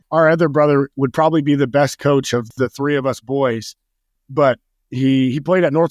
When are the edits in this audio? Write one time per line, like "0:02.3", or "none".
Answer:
0:00.9
0:02.5
0:04.1